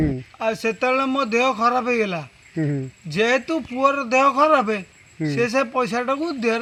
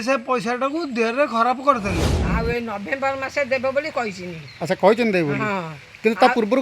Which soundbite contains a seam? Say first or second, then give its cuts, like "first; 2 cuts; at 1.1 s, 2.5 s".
second; 1 cut; at 2.1 s